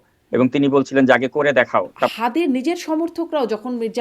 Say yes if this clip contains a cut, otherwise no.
yes